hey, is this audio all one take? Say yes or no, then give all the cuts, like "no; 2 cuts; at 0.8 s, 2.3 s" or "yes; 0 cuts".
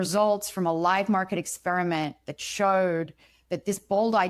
yes; 0 cuts